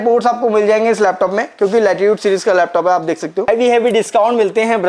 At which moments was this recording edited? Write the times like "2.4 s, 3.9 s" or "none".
3.5 s